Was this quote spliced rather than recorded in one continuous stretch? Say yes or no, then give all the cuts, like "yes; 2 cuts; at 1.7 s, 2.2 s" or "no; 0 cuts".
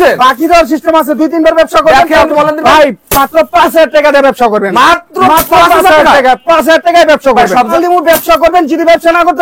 yes; 2 cuts; at 2.3 s, 7.7 s